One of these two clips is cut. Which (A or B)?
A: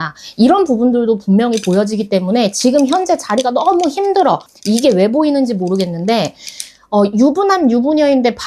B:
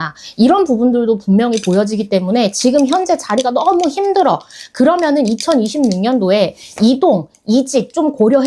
A